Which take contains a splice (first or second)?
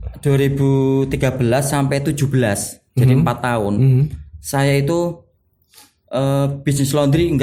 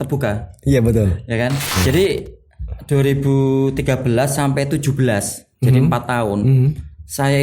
second